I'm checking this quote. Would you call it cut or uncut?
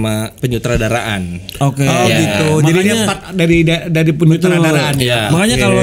uncut